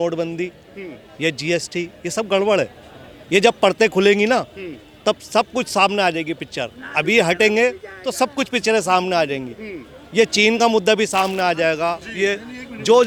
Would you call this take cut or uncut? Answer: uncut